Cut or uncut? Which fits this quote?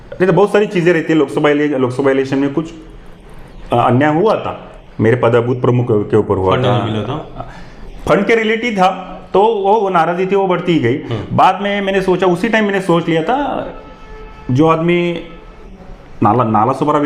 uncut